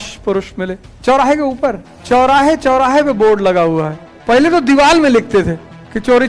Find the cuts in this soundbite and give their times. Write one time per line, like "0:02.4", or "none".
0:01.9
0:04.1